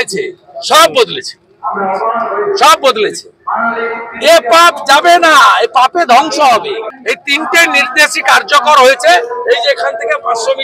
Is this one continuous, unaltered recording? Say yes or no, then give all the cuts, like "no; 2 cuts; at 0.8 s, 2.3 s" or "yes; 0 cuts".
no; 1 cut; at 6.9 s